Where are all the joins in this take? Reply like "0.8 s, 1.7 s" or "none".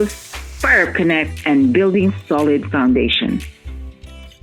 3.5 s